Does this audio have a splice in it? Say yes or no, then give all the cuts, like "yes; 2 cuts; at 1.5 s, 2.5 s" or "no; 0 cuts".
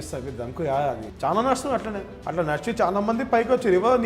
yes; 2 cuts; at 1.1 s, 2.1 s